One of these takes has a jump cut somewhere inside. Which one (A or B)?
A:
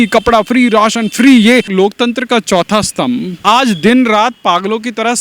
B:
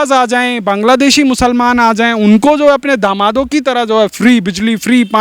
A